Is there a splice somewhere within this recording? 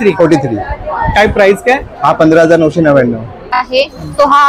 yes; 1 cut; at 3.6 s

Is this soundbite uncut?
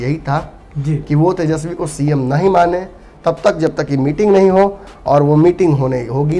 yes; 0 cuts

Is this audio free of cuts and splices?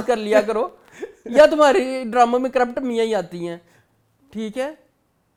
yes; 0 cuts

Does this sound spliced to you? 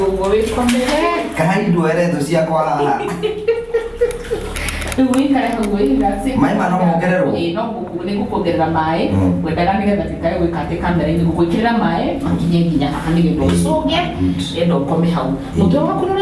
no; 0 cuts

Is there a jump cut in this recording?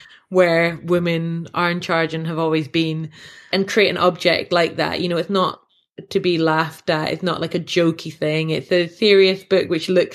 no; 0 cuts

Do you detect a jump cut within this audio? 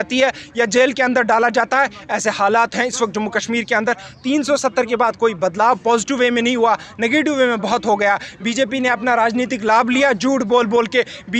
no; 0 cuts

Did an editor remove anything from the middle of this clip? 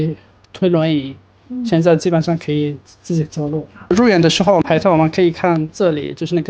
no; 0 cuts

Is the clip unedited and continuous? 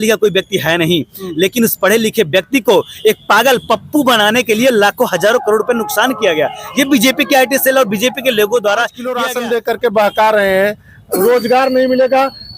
no; 1 cut; at 9.2 s

